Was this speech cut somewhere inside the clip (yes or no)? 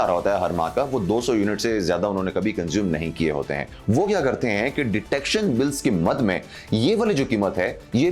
yes